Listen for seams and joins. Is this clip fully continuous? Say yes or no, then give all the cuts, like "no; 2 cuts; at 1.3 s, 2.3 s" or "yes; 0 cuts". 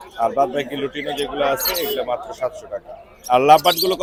yes; 0 cuts